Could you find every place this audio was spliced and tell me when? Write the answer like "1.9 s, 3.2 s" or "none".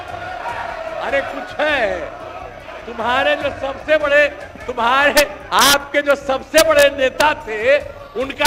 none